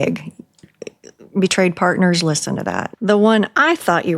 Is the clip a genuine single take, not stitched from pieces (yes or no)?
no